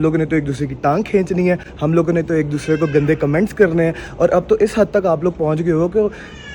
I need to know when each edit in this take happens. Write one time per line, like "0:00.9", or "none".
none